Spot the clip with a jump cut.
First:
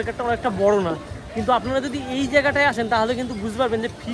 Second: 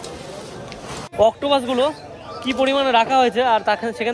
second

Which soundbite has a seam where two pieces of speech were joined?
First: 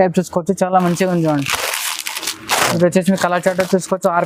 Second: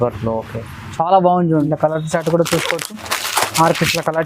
second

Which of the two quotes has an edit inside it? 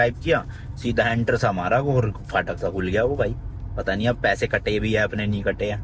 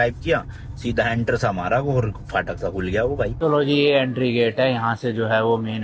second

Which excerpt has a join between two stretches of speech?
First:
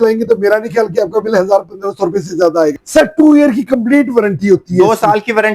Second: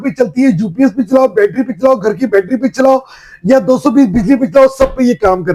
first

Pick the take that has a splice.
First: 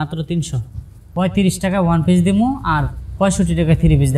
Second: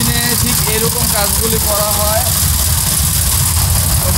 first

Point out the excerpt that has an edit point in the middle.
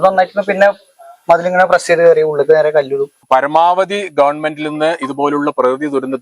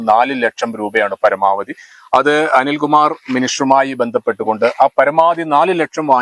first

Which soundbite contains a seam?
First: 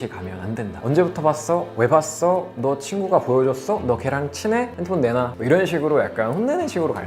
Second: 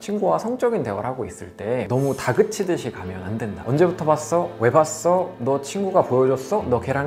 first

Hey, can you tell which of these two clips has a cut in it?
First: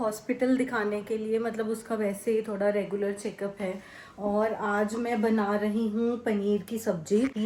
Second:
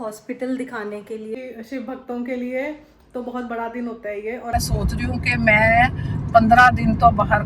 second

